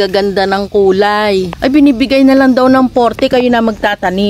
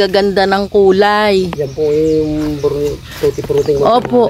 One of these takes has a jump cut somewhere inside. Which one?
first; 1 cut; at 1.5 s

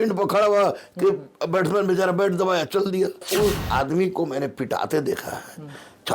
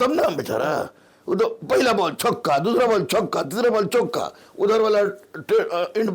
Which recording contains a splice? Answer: first; 1 cut; at 3.2 s

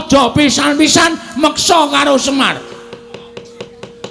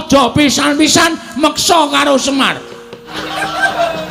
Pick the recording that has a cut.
second; 1 cut; at 3.1 s

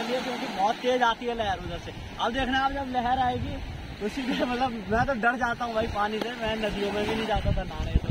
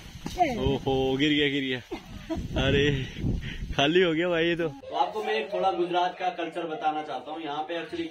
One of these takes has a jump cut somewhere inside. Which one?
second; 1 cut; at 4.8 s

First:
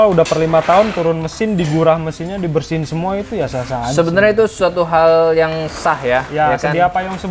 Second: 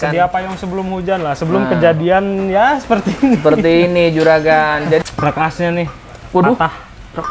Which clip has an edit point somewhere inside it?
second; 1 cut; at 5.0 s

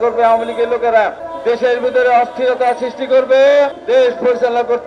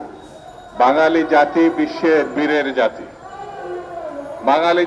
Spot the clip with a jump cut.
first; 2 cuts; at 1.3 s, 3.8 s

